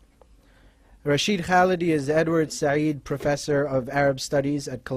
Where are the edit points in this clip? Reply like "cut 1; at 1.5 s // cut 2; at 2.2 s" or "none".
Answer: cut 1; at 3.2 s